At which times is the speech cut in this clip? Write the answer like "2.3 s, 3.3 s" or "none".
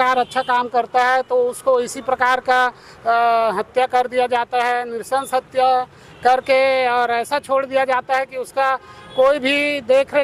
none